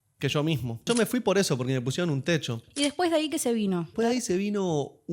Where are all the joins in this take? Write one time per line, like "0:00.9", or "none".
0:00.9
0:02.6